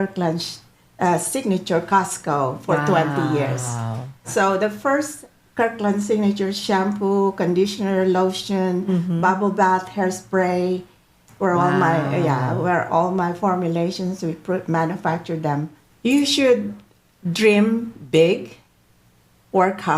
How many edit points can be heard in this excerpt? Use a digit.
1